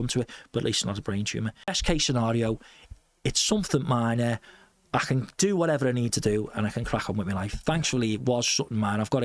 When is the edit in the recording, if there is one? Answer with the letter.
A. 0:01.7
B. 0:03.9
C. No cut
A